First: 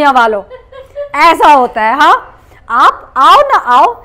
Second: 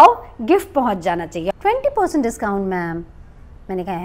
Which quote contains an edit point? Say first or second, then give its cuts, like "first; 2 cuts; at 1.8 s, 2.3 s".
second; 1 cut; at 1.5 s